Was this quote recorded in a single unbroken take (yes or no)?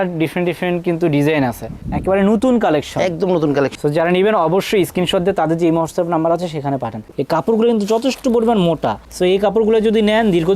no